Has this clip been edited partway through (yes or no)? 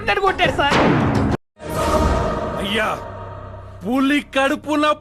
yes